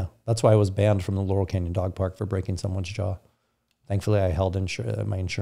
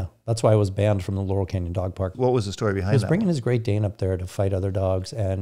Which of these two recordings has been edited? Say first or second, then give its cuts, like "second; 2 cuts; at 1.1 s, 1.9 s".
second; 1 cut; at 2.1 s